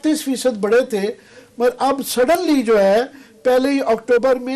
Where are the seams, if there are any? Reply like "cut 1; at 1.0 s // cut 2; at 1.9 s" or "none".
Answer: none